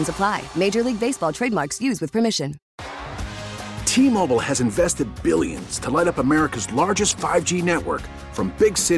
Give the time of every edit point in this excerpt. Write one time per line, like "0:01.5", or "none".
0:02.7